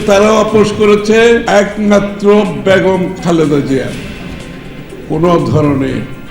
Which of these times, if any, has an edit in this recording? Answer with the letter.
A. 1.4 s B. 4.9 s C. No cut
A